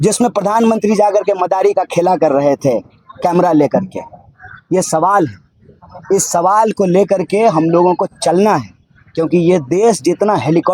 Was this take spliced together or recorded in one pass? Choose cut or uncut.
uncut